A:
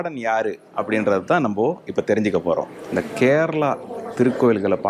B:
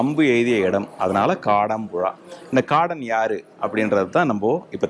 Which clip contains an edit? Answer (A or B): A